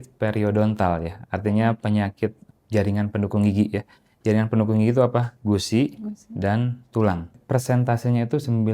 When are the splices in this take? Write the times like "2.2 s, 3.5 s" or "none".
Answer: 2.5 s, 5.3 s, 7.4 s